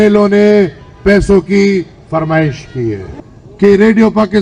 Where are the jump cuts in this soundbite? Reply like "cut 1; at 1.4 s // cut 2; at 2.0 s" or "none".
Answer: cut 1; at 3.1 s